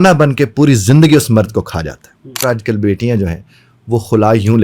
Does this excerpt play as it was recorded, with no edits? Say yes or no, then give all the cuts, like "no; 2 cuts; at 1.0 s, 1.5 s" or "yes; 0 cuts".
no; 1 cut; at 2.4 s